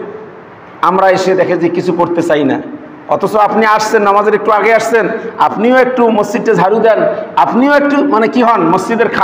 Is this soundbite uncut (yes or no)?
yes